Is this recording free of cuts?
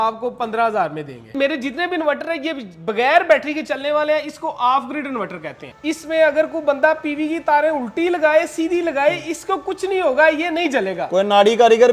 no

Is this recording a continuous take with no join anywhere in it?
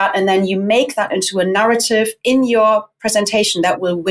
yes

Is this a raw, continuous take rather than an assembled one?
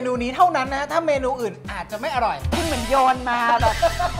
no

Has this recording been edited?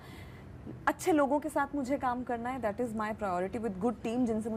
no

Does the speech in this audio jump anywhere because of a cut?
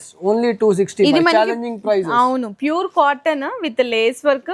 no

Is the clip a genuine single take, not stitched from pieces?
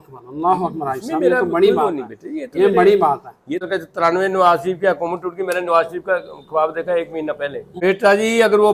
no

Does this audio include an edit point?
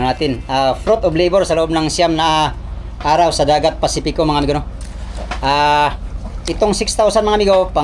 no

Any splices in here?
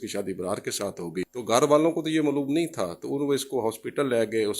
yes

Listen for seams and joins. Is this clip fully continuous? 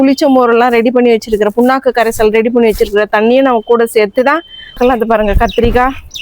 no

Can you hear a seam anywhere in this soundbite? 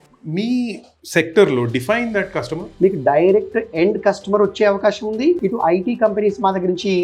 yes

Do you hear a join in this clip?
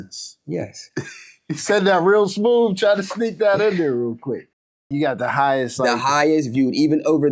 yes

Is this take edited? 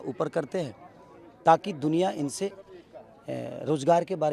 no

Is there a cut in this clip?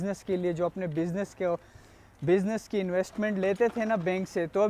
no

